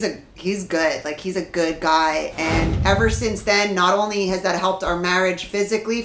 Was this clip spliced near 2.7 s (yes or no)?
yes